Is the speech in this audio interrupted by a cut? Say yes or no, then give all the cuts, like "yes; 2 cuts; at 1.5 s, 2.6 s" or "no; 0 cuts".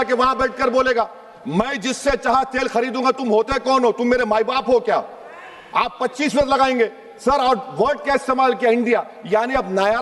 no; 0 cuts